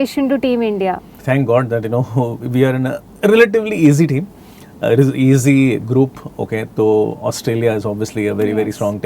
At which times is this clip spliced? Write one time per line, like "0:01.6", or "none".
none